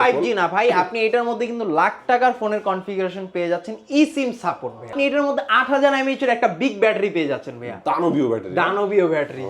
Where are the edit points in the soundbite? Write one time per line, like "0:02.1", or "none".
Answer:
0:04.9